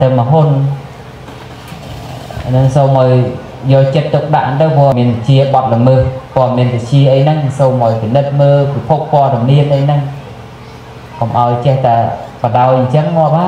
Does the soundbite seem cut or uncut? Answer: cut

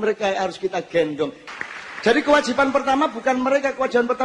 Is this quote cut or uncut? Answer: cut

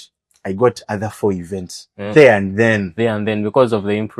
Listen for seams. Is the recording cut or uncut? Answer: uncut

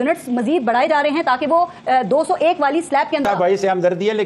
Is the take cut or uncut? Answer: cut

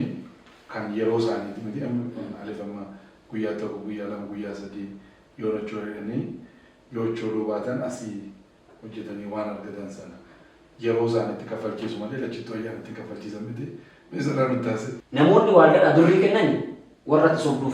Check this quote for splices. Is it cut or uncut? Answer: cut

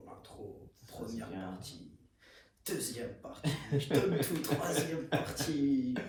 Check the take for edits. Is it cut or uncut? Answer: uncut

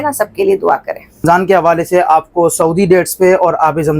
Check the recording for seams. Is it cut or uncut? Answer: cut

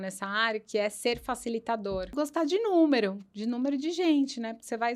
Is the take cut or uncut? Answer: cut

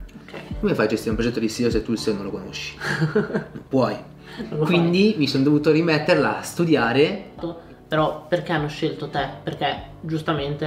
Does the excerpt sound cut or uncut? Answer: cut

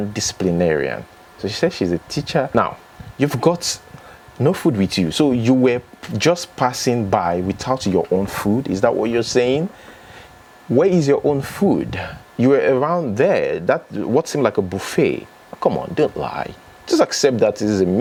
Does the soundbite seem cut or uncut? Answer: uncut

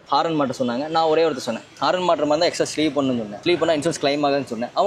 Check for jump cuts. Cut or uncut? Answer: cut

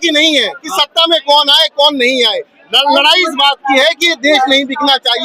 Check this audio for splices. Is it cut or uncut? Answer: uncut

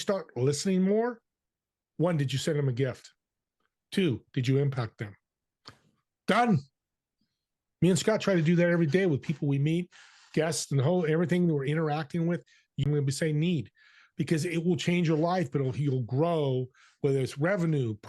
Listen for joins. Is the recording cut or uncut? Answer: cut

